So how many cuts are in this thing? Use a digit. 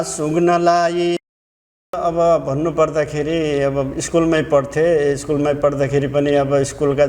1